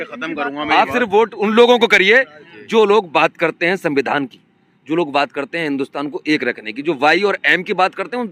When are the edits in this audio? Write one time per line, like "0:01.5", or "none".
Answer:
none